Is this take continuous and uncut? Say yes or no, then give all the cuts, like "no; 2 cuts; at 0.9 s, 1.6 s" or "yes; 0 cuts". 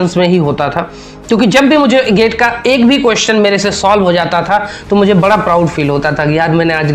yes; 0 cuts